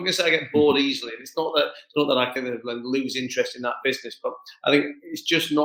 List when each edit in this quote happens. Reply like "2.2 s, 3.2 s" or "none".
none